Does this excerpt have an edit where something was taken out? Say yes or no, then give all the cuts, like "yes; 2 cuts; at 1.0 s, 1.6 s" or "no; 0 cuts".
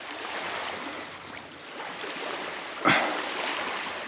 yes; 1 cut; at 1.7 s